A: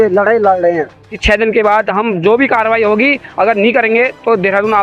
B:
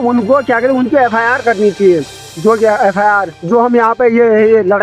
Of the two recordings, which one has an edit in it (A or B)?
A